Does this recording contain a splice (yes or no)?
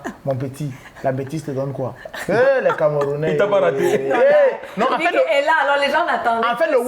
no